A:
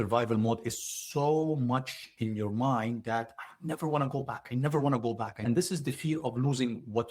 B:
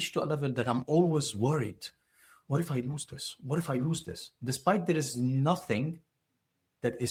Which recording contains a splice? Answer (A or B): A